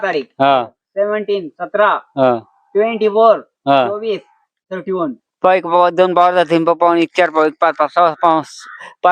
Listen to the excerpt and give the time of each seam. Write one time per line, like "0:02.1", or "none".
0:05.2

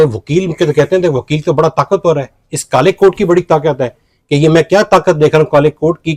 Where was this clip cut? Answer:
none

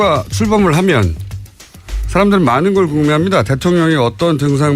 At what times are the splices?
none

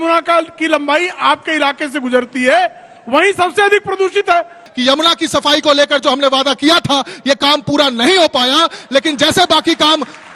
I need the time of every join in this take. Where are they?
0:04.6

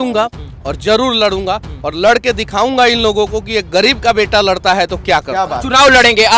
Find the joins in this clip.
0:05.5

